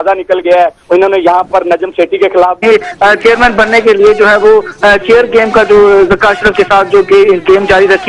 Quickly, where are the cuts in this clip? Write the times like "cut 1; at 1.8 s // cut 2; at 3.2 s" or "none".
none